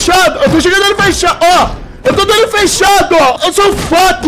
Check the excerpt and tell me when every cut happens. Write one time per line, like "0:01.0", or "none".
0:03.3